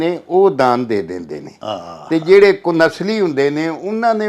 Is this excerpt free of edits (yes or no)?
yes